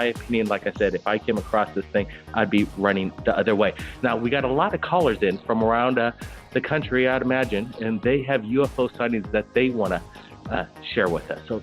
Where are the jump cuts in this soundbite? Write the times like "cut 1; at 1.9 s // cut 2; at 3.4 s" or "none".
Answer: cut 1; at 10.3 s